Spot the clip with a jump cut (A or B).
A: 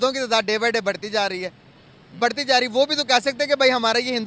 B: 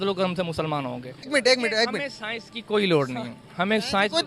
B